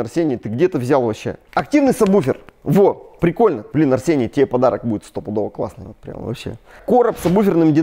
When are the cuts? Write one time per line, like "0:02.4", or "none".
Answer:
0:01.4
0:03.7
0:06.7